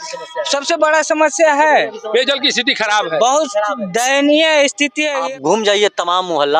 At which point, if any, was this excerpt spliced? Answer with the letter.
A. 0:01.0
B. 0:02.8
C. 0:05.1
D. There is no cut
C